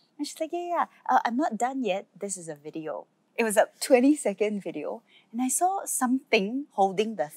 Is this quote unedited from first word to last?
no; 1 cut; at 3.2 s

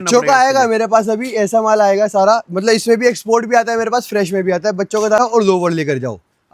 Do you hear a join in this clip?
yes; 1 cut; at 5.2 s

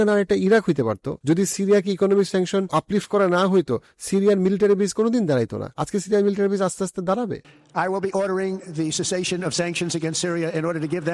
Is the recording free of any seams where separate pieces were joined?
no; 3 cuts; at 1.1 s, 2.7 s, 7.4 s

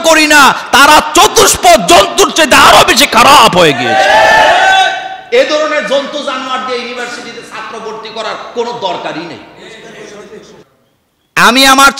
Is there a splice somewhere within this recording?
yes; 1 cut; at 10.8 s

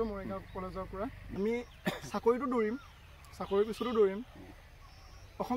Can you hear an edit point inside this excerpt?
yes; 1 cut; at 1.2 s

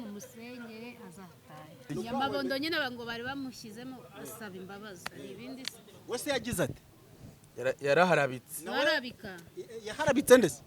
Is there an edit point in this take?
yes; 1 cut; at 1.9 s

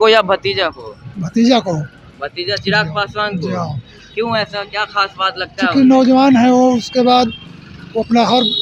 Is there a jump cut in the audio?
no; 0 cuts

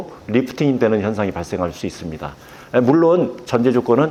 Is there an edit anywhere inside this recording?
no; 0 cuts

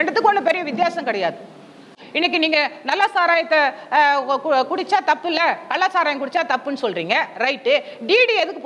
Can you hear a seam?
yes; 1 cut; at 2.0 s

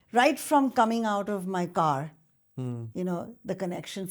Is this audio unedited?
yes; 0 cuts

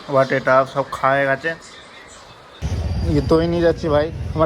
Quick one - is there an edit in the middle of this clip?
yes; 1 cut; at 2.7 s

